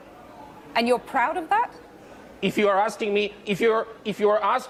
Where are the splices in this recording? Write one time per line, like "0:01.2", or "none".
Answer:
none